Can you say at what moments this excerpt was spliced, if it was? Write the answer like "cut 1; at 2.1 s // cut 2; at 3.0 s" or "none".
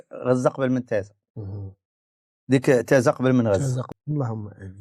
cut 1; at 3.9 s